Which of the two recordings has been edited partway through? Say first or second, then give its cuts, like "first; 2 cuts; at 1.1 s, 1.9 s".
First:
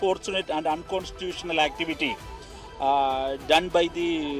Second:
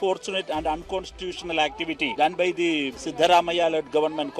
second; 2 cuts; at 2.1 s, 3.0 s